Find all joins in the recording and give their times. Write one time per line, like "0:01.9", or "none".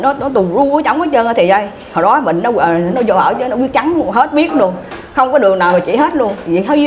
none